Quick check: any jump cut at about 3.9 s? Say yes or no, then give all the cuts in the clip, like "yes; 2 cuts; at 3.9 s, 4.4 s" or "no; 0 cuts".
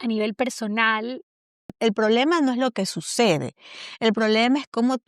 no; 1 cut; at 1.8 s